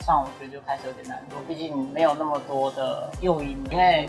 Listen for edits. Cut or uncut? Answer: uncut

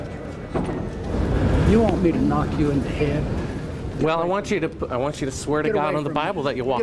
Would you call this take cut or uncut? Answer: cut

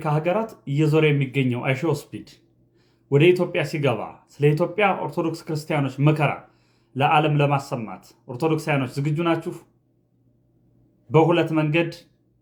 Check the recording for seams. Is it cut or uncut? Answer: uncut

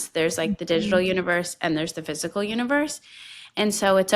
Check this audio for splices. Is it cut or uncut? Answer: uncut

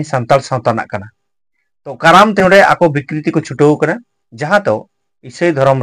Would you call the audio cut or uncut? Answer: cut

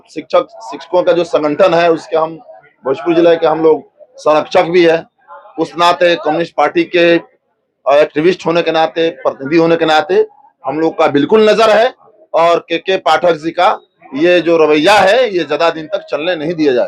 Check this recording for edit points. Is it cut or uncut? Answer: uncut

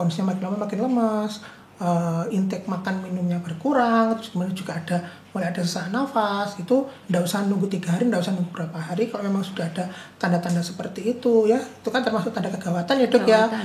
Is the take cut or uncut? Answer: uncut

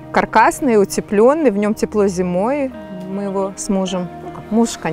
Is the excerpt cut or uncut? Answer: cut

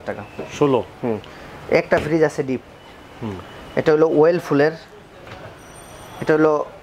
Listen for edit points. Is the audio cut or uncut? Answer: uncut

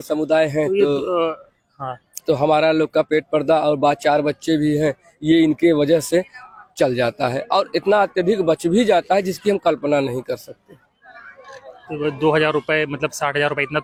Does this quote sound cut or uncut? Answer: uncut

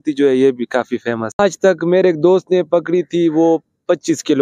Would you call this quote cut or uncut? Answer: cut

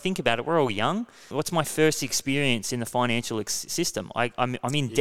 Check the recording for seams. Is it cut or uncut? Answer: cut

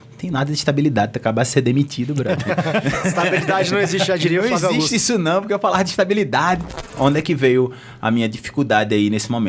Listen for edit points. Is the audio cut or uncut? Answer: cut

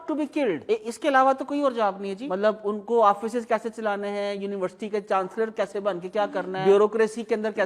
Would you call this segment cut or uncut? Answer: uncut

